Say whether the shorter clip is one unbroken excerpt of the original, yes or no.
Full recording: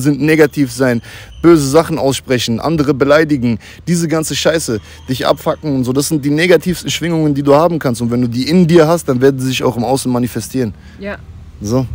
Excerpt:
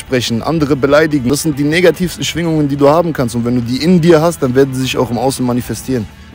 no